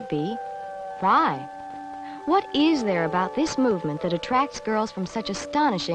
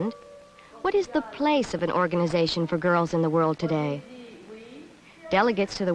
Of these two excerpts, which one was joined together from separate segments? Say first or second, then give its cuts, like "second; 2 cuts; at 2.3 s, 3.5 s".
first; 1 cut; at 2.7 s